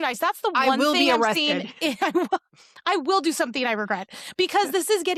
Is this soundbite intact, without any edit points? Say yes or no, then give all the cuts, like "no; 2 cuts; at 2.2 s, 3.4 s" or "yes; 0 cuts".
yes; 0 cuts